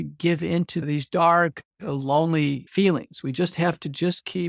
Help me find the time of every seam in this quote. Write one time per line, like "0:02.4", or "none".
0:00.8
0:02.6